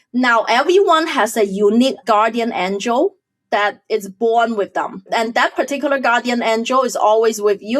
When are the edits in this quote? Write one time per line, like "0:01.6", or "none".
0:02.0